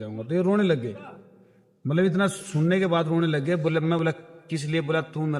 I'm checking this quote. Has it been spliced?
no; 0 cuts

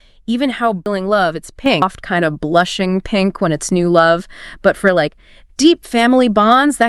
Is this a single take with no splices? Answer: no; 2 cuts; at 0.9 s, 1.8 s

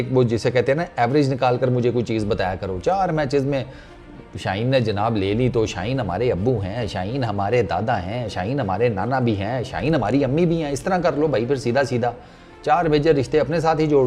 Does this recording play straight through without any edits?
yes; 0 cuts

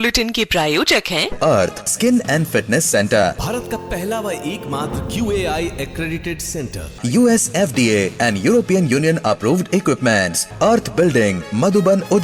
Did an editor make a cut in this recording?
no; 0 cuts

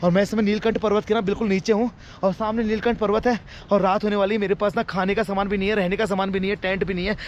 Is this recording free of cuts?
yes; 0 cuts

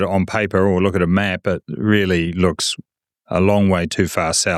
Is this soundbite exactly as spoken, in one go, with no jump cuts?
yes; 0 cuts

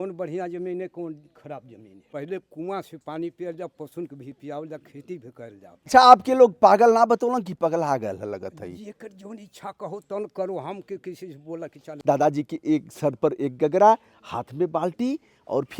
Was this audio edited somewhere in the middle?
yes; 3 cuts; at 2.1 s, 5.9 s, 11.9 s

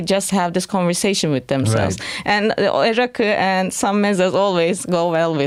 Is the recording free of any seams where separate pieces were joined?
yes; 0 cuts

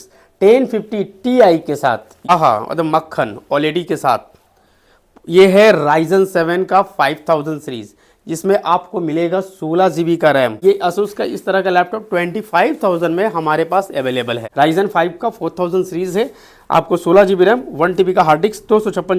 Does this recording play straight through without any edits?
no; 3 cuts; at 2.3 s, 10.6 s, 14.4 s

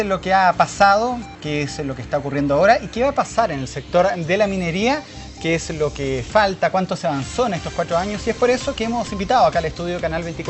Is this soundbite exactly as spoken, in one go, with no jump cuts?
yes; 0 cuts

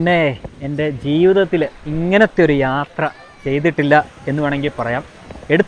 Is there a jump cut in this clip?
no; 0 cuts

